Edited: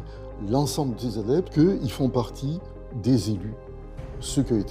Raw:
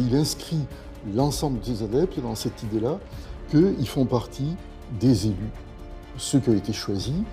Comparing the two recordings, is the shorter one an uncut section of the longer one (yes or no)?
no